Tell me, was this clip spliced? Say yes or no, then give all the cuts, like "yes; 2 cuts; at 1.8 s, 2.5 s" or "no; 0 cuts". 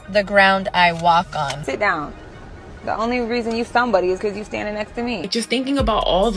yes; 2 cuts; at 1.6 s, 5.3 s